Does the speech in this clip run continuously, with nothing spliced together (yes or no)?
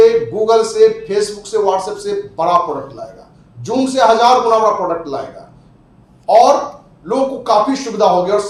yes